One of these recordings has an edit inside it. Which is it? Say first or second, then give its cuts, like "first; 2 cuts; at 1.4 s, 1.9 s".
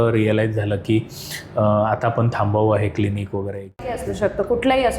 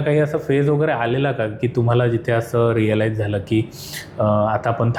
first; 1 cut; at 3.9 s